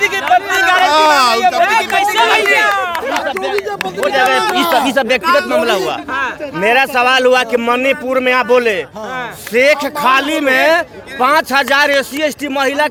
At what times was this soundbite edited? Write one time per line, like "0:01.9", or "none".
none